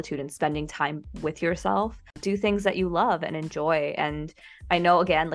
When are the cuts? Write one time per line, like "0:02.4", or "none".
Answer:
0:02.2